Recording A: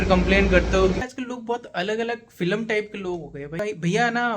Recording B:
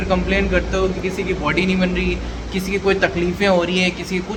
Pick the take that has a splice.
A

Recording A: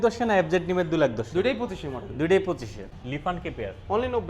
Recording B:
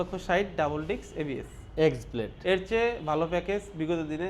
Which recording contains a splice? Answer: A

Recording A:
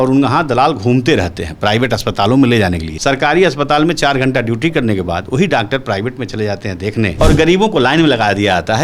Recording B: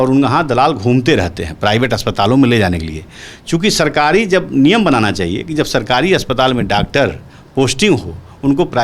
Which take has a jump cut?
A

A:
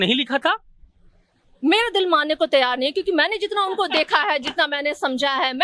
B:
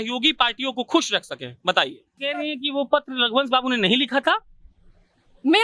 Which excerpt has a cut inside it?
B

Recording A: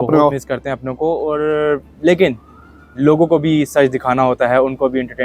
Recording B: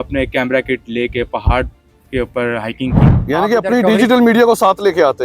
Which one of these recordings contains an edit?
B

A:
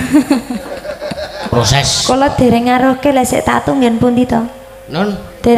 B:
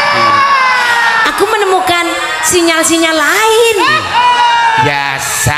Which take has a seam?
A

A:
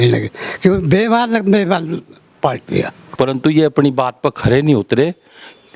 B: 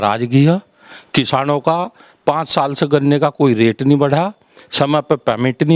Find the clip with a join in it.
A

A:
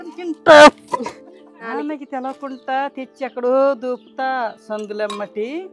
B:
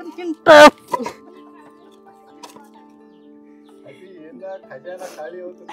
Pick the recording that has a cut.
A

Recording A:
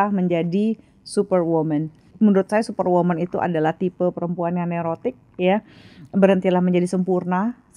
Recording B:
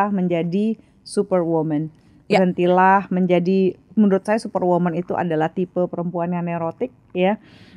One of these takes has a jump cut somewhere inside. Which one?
A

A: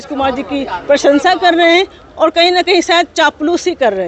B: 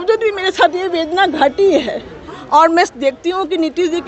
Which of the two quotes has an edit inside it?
B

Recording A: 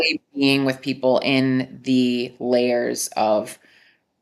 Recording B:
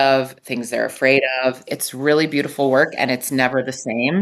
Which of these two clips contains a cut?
B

